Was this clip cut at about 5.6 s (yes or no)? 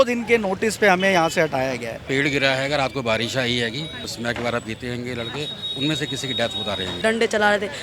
no